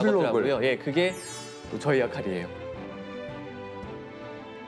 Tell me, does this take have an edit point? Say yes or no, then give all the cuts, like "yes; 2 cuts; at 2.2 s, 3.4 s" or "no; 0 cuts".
no; 0 cuts